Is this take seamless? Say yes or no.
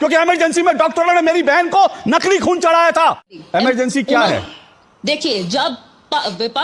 no